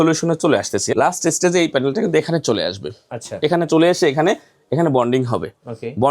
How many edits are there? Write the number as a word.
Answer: one